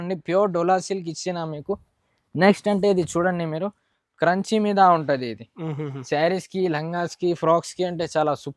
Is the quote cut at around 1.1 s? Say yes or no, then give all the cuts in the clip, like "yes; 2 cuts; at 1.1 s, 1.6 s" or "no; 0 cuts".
no; 0 cuts